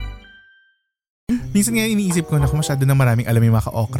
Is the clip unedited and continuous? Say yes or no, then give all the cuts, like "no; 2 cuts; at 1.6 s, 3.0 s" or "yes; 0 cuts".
no; 1 cut; at 1.3 s